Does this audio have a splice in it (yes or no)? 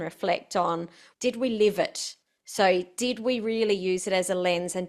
yes